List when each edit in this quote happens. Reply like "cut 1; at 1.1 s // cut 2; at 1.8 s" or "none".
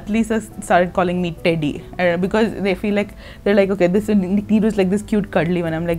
cut 1; at 1.4 s